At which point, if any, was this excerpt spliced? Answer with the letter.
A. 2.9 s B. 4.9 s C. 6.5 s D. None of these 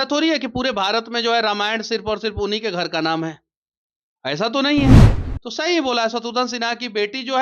B